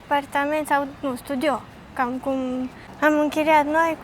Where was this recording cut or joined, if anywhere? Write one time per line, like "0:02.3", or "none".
0:02.8